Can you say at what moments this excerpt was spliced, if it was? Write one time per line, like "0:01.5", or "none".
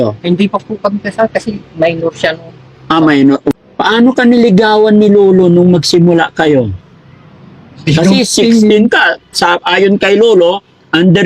0:03.5